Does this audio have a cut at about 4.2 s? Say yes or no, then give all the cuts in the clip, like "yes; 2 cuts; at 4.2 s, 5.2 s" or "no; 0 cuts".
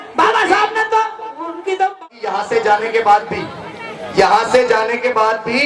no; 1 cut; at 2.0 s